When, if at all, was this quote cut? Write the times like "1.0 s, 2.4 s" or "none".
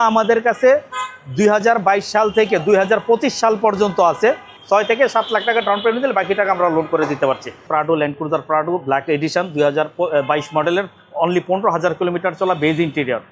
4.5 s, 7.7 s